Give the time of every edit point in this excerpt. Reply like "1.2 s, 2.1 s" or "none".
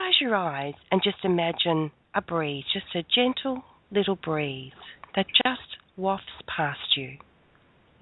2.0 s